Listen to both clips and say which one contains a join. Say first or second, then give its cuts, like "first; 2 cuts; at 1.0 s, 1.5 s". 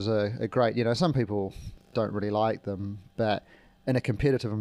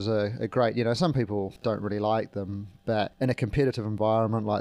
second; 2 cuts; at 1.5 s, 3.1 s